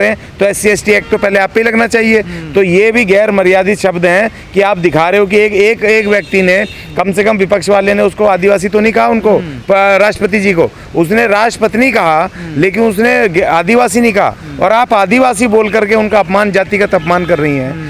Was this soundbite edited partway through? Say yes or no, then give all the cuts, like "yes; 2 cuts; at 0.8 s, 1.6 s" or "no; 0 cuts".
no; 0 cuts